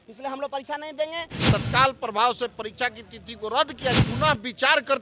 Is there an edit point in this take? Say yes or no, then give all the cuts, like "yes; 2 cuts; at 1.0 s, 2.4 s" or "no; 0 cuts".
yes; 2 cuts; at 1.3 s, 4.0 s